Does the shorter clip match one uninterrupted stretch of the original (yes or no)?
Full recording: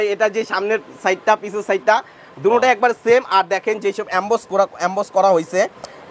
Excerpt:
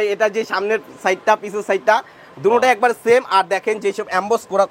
yes